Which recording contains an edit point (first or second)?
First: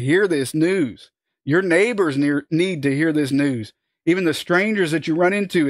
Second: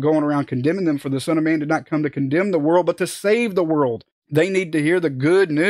second